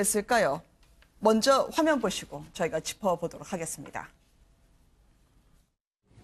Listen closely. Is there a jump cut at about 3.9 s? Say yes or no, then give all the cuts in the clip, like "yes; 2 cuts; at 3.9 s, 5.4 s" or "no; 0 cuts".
no; 0 cuts